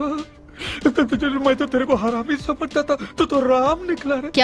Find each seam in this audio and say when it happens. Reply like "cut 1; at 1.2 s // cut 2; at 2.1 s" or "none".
none